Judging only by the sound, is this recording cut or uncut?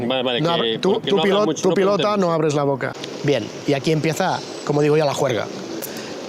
cut